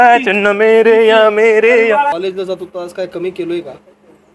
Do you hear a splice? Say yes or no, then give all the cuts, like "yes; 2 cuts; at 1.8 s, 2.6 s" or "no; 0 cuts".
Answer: yes; 1 cut; at 2.1 s